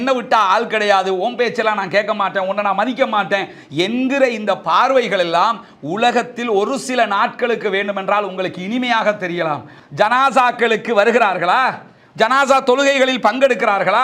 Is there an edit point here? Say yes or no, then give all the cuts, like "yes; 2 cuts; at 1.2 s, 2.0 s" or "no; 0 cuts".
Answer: yes; 1 cut; at 9.8 s